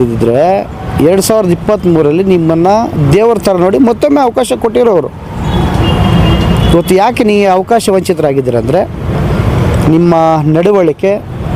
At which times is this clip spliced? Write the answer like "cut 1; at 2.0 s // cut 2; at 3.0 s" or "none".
none